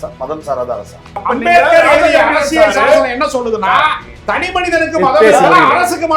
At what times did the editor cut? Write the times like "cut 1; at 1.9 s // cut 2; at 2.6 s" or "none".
cut 1; at 1.2 s